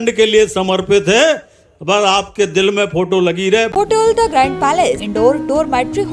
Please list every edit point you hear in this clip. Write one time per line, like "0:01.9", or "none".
0:03.7
0:05.1